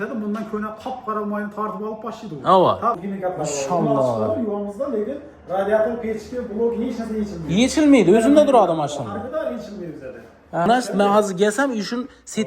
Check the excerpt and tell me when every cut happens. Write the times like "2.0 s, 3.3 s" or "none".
3.0 s, 10.7 s